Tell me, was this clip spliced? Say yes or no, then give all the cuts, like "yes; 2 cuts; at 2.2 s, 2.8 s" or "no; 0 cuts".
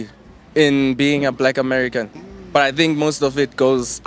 no; 0 cuts